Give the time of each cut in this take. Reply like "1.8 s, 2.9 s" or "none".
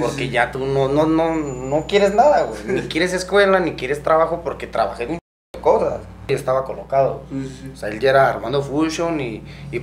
6.3 s